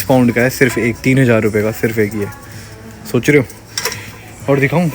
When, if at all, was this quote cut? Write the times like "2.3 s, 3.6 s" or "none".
none

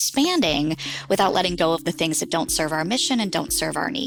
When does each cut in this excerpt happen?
none

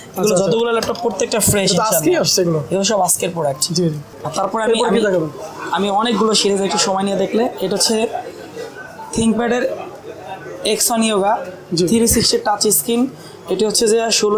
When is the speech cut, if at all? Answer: none

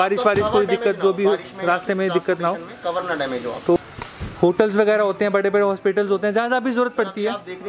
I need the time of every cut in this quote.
3.8 s

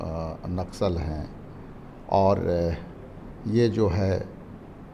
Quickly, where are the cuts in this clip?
none

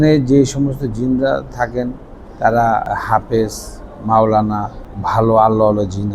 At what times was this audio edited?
2.8 s, 4.7 s

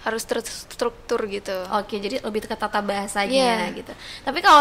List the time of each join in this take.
none

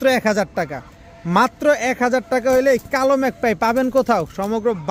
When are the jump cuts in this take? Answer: none

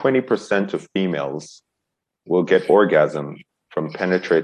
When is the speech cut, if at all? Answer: none

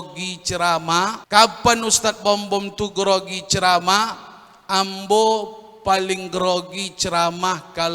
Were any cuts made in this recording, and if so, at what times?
1.2 s

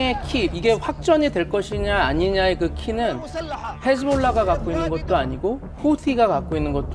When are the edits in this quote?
none

